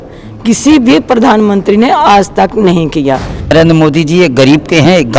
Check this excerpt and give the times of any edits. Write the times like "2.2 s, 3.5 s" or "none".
3.5 s